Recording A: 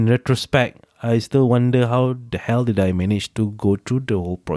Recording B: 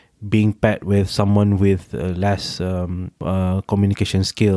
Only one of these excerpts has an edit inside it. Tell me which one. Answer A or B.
B